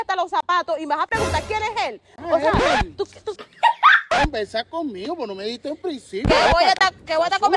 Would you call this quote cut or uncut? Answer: cut